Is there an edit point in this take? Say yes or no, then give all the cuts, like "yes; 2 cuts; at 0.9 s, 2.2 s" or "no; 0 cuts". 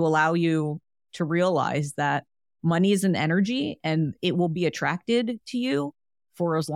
no; 0 cuts